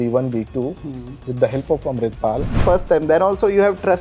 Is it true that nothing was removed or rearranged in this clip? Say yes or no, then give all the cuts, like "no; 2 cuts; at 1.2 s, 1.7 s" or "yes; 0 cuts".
no; 1 cut; at 2.6 s